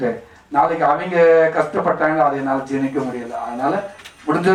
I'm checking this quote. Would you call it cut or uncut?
uncut